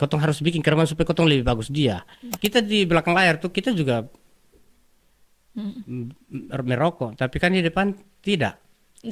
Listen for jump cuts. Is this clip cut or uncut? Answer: cut